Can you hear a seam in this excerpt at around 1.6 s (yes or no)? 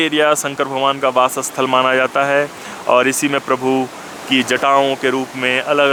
no